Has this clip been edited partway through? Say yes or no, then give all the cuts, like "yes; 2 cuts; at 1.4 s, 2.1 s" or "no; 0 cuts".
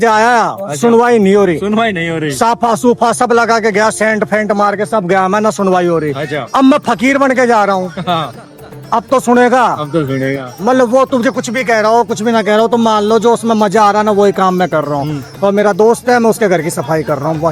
no; 0 cuts